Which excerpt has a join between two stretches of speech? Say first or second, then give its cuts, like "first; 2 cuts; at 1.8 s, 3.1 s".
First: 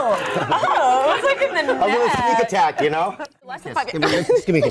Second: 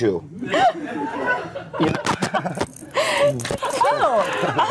first; 1 cut; at 3.6 s